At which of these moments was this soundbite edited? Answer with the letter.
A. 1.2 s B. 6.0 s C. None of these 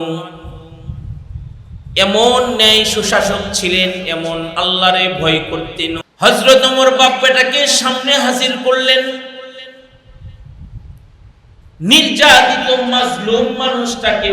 B